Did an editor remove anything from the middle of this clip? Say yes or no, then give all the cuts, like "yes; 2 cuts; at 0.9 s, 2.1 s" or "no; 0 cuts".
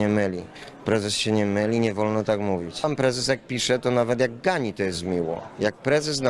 yes; 1 cut; at 2.8 s